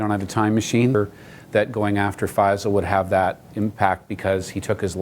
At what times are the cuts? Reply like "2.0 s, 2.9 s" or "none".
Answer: 0.9 s